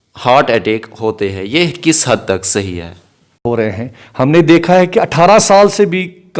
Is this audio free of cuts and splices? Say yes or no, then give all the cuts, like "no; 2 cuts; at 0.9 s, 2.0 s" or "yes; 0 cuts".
no; 1 cut; at 3.4 s